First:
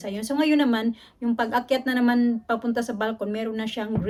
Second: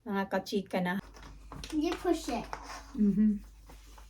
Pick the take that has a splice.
second; 1 cut; at 1.0 s

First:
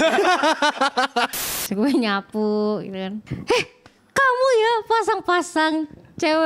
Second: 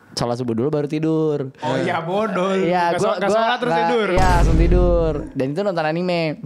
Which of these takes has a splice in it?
first; 2 cuts; at 1.4 s, 3.3 s

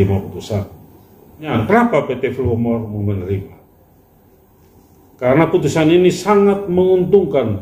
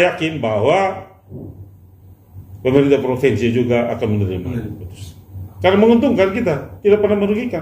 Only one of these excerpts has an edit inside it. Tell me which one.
first; 1 cut; at 1.5 s

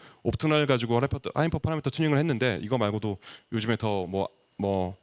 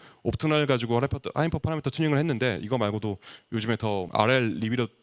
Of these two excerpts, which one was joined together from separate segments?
second; 1 cut; at 4.1 s

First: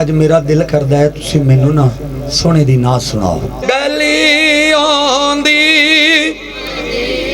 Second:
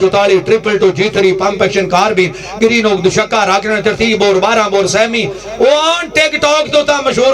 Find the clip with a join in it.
first; 1 cut; at 3.6 s

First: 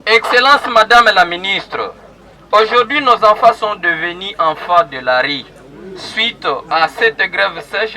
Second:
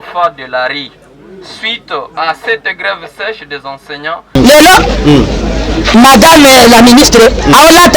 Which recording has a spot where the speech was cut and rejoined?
second; 1 cut; at 4.4 s

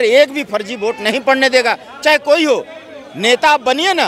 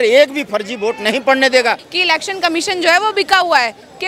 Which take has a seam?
second; 1 cut; at 1.9 s

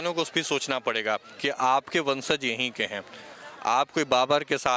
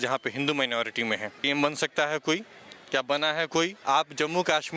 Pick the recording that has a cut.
second; 2 cuts; at 1.4 s, 3.8 s

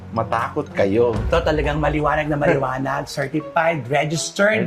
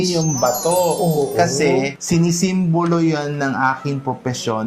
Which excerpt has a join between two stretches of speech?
first; 1 cut; at 1.3 s

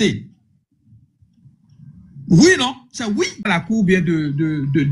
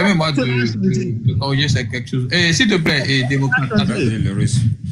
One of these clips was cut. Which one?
first; 1 cut; at 3.4 s

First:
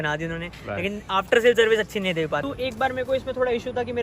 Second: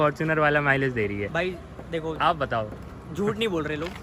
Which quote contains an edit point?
first; 1 cut; at 2.4 s

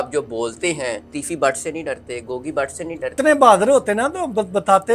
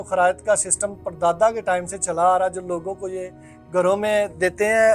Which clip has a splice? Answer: first; 2 cuts; at 1.1 s, 3.1 s

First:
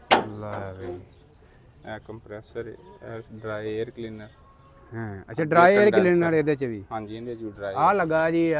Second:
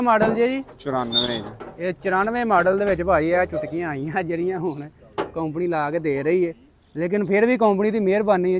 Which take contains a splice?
first; 1 cut; at 7.6 s

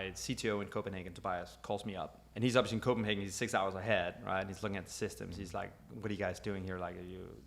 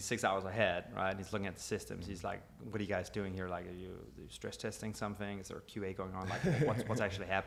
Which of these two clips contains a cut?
first; 1 cut; at 2.2 s

